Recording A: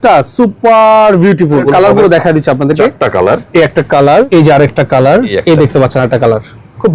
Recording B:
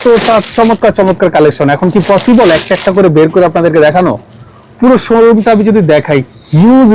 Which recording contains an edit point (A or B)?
A